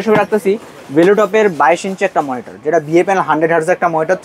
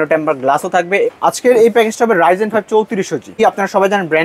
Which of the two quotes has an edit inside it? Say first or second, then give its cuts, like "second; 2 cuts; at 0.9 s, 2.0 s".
second; 2 cuts; at 1.1 s, 3.4 s